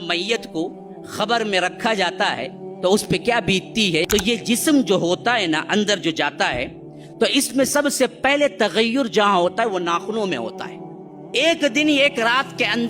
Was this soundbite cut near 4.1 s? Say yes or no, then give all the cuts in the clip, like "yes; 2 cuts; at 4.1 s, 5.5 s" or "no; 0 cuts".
yes; 1 cut; at 4.1 s